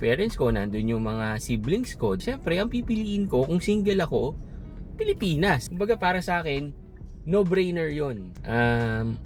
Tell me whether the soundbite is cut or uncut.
uncut